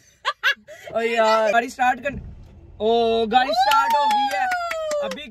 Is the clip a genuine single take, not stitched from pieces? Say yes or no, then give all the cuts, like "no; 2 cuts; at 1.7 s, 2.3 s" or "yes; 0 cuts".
no; 1 cut; at 1.5 s